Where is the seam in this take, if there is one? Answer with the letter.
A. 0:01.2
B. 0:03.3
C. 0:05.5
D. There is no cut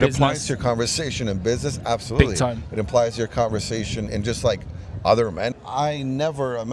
C